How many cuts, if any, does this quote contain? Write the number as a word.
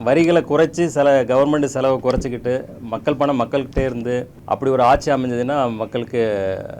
one